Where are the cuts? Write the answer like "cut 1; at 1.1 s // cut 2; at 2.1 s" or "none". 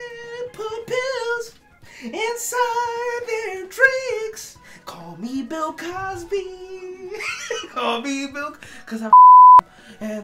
none